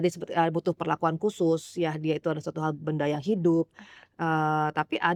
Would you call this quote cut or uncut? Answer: uncut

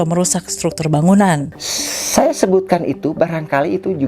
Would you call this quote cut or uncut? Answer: cut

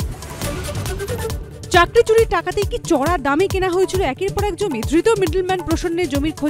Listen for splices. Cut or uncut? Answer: cut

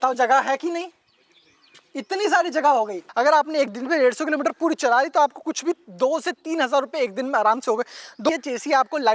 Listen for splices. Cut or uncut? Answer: cut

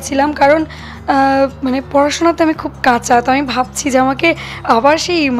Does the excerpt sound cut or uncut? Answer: uncut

